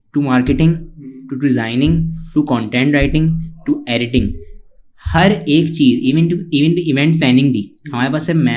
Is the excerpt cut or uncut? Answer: uncut